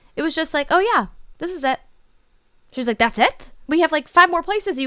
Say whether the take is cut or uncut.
cut